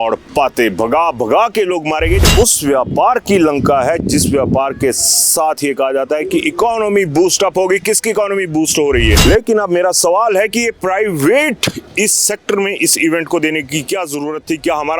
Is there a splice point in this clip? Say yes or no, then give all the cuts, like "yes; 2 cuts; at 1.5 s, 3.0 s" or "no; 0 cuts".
yes; 2 cuts; at 2.2 s, 9.2 s